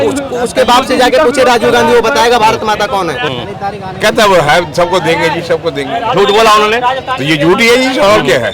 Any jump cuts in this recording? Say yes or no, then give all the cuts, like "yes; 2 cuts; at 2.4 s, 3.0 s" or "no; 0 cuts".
yes; 1 cut; at 3.3 s